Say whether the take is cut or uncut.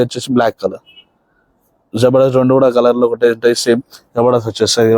uncut